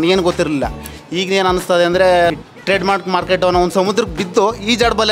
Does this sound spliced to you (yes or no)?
yes